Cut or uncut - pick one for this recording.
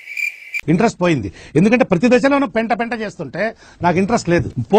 uncut